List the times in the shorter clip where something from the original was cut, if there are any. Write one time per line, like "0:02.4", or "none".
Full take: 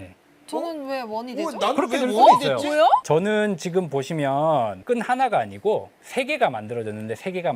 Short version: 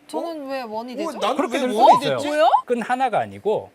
0:02.6